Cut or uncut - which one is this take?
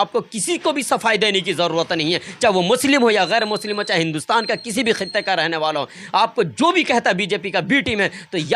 uncut